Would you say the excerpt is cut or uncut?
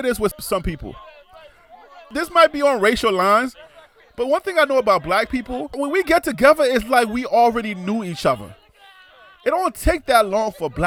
uncut